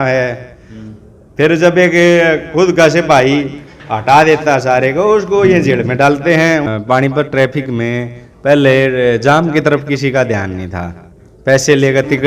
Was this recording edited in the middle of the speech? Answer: yes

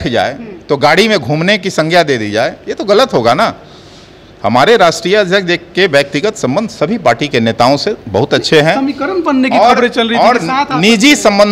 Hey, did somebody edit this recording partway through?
no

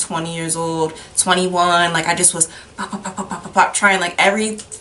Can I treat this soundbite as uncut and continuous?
yes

